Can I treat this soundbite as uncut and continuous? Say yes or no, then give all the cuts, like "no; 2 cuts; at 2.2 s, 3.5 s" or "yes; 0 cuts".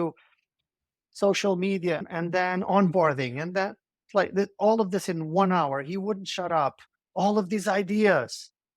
yes; 0 cuts